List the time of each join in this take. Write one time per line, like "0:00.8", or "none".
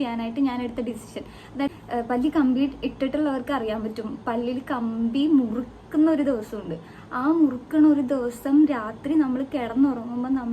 0:01.7